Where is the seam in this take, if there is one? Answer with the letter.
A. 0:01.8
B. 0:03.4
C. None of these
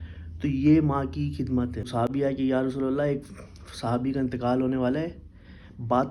A